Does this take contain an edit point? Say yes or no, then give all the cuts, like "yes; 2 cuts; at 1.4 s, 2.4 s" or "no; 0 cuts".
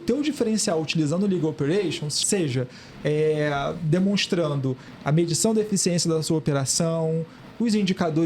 yes; 1 cut; at 2.2 s